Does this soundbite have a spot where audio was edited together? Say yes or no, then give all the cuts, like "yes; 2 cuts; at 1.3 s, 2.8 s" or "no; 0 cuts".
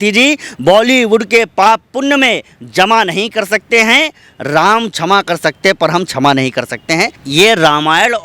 yes; 1 cut; at 7.2 s